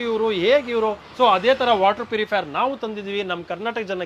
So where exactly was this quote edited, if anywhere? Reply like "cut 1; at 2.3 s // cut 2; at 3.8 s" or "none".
cut 1; at 1.0 s